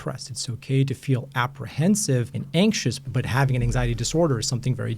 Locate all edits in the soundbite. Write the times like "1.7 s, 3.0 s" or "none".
2.4 s, 3.1 s